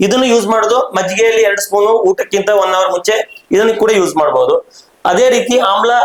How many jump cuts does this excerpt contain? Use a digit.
0